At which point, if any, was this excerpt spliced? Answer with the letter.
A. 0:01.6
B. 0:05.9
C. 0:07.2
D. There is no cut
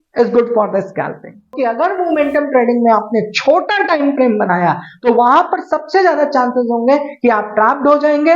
A